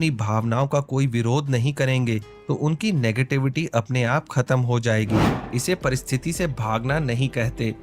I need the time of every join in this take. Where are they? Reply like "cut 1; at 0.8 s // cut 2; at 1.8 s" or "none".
cut 1; at 5.4 s